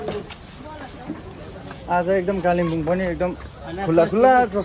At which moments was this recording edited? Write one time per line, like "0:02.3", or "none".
none